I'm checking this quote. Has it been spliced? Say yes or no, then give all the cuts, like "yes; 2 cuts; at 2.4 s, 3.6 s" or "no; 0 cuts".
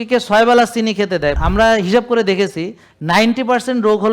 yes; 1 cut; at 1.4 s